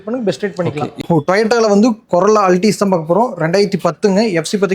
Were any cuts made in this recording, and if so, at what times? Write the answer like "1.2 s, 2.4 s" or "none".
1.0 s

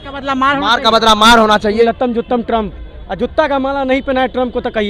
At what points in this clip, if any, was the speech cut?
1.8 s

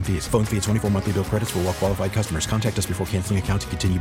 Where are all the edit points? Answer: none

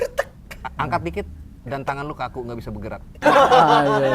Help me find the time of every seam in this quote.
3.2 s

